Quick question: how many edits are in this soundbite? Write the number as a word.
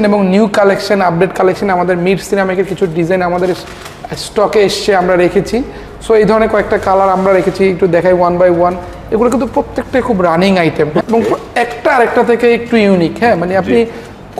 one